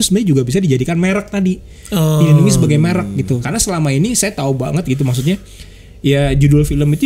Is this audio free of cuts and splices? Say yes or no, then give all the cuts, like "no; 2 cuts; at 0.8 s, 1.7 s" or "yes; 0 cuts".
no; 1 cut; at 3.4 s